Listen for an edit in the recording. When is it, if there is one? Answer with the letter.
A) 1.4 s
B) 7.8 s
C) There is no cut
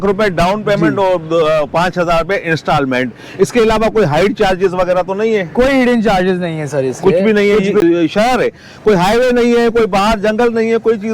B